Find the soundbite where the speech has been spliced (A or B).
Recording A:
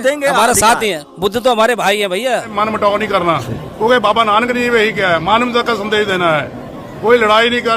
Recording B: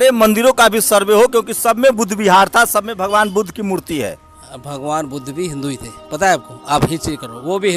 A